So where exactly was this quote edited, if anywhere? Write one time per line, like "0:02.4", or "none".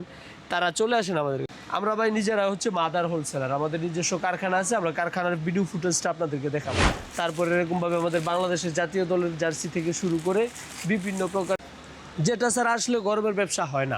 0:01.5
0:07.0
0:11.6